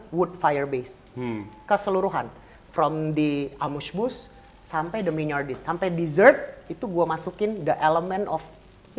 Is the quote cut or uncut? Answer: uncut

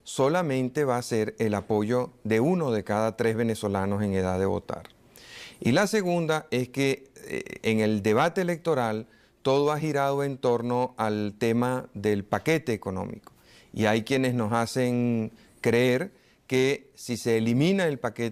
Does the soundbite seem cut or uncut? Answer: uncut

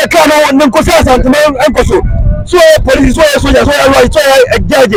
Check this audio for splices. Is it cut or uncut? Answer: uncut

